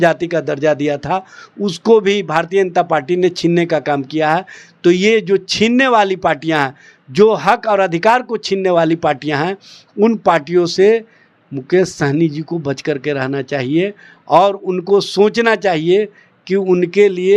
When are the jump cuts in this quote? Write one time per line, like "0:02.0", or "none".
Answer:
none